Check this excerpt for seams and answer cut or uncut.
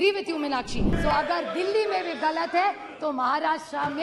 cut